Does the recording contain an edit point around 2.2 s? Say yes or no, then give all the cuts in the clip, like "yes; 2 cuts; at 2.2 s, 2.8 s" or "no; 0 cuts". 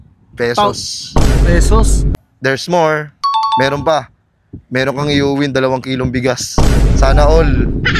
yes; 1 cut; at 2.2 s